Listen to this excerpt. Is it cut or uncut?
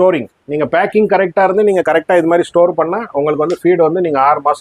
uncut